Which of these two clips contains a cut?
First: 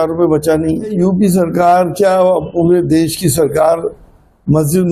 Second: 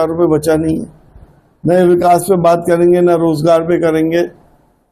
first; 1 cut; at 0.9 s

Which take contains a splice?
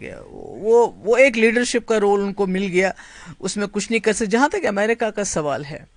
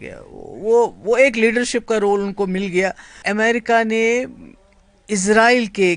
second; 1 cut; at 3.2 s

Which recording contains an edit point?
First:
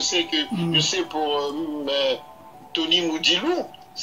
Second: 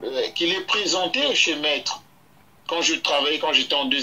first; 1 cut; at 2.4 s

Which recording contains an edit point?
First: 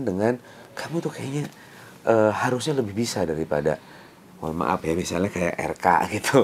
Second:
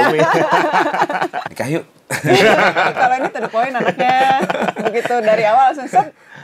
second; 1 cut; at 1.5 s

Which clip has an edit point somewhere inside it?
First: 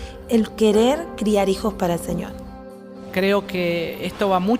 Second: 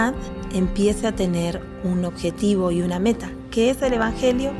first; 1 cut; at 2.9 s

